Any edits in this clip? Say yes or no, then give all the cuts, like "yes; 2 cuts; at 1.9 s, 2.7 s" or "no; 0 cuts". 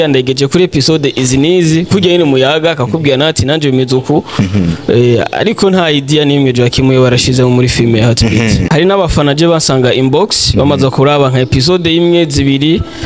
yes; 1 cut; at 8.6 s